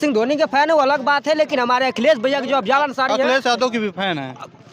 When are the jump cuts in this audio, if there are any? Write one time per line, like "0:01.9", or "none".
none